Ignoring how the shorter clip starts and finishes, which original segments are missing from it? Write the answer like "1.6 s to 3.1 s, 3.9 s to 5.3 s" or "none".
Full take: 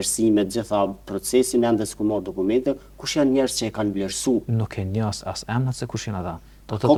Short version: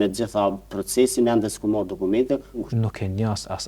3.0 s to 4.4 s

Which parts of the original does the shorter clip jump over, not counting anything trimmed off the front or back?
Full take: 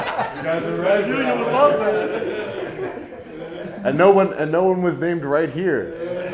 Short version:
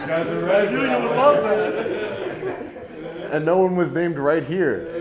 3.7 s to 4.4 s

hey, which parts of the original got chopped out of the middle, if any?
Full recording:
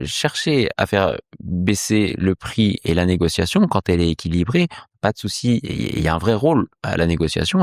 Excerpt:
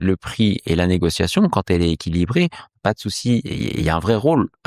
none

